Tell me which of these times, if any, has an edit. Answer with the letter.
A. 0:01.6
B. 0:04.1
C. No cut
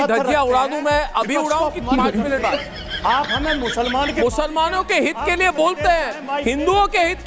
B